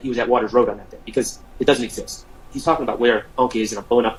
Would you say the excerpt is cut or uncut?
uncut